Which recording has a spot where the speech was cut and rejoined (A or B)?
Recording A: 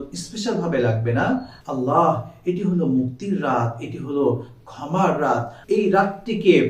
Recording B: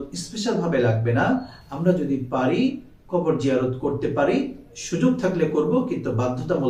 A